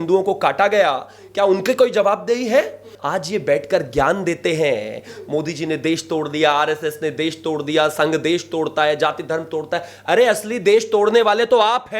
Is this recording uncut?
no; 1 cut; at 2.9 s

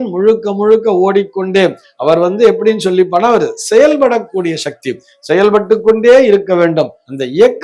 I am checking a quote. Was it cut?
no; 0 cuts

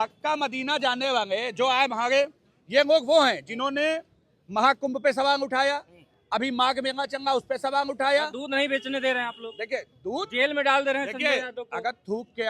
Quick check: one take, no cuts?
yes; 0 cuts

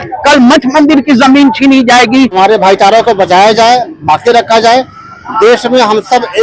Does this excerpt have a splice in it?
yes; 1 cut; at 2.3 s

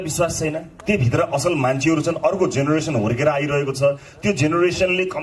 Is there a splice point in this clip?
no; 0 cuts

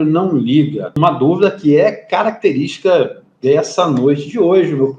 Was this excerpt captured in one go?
no; 1 cut; at 1.0 s

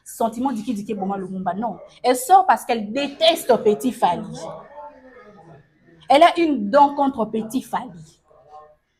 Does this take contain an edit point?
no; 0 cuts

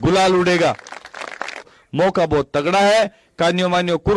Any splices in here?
yes; 1 cut; at 1.8 s

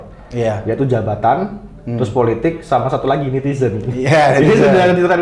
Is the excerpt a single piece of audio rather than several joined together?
yes; 0 cuts

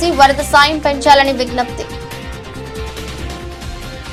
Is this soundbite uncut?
yes; 0 cuts

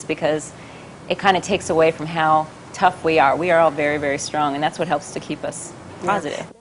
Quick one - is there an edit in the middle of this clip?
yes; 1 cut; at 0.9 s

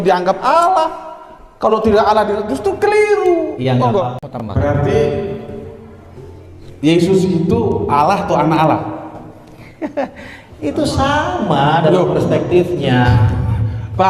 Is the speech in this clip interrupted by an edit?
yes; 1 cut; at 4.2 s

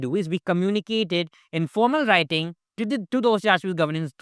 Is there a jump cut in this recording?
no; 0 cuts

